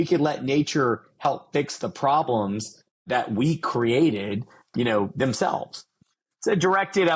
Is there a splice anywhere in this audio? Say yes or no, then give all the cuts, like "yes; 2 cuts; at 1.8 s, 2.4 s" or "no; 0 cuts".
yes; 3 cuts; at 3.0 s, 4.7 s, 6.0 s